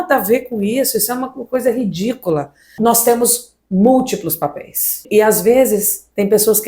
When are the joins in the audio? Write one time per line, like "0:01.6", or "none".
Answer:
0:02.6
0:05.0

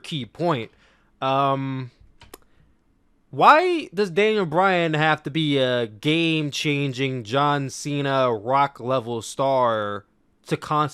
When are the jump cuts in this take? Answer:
none

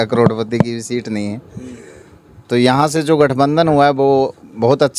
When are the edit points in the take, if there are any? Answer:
none

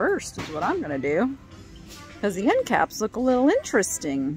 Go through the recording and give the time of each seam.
none

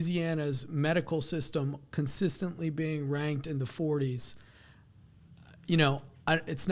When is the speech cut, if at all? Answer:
none

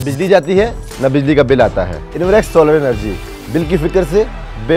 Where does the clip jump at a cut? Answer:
0:02.0

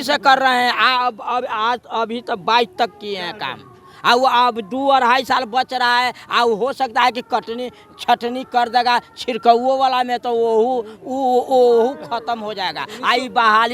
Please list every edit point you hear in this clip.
none

